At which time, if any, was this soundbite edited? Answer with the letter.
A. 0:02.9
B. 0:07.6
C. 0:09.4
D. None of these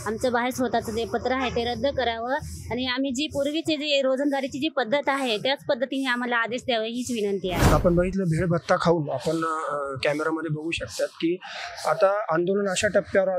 B